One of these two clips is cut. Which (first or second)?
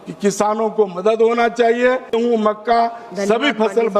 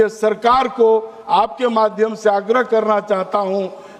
first